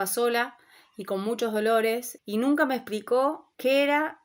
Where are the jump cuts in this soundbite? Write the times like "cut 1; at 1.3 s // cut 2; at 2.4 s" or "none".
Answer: none